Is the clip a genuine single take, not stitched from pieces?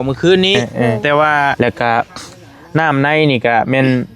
no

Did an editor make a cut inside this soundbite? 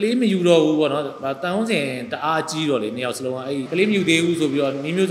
yes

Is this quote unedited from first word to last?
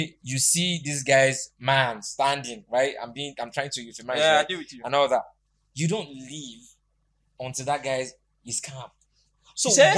yes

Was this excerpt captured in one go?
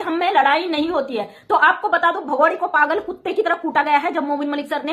yes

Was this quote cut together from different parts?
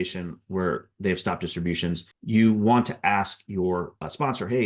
no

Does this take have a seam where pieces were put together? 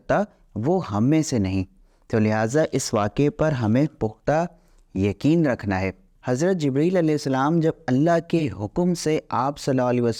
no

